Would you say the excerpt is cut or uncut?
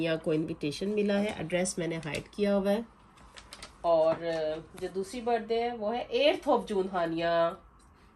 uncut